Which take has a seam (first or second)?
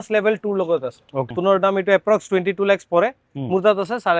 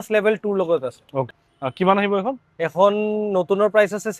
first